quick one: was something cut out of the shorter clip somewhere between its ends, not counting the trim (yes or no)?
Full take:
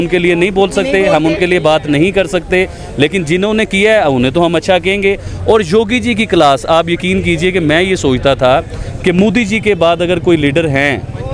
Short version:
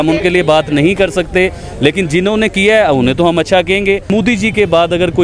yes